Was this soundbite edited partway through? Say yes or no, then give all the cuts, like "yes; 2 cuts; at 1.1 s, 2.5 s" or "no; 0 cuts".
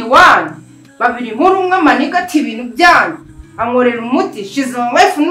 no; 0 cuts